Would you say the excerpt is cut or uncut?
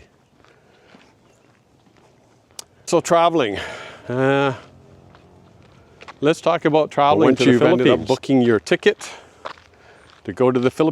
cut